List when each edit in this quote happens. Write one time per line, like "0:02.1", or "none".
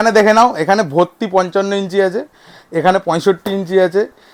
none